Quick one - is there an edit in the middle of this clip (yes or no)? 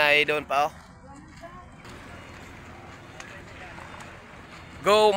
yes